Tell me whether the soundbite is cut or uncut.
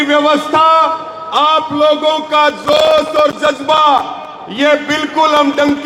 uncut